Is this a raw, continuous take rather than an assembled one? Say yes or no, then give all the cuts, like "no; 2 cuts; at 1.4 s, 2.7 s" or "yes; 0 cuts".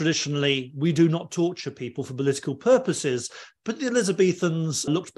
yes; 0 cuts